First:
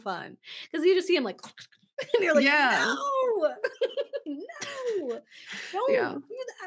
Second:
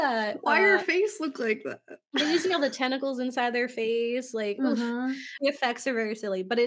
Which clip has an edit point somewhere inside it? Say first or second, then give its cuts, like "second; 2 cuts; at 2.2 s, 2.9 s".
second; 1 cut; at 5.4 s